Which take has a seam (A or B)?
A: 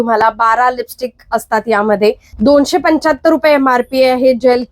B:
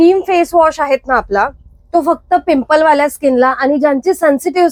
A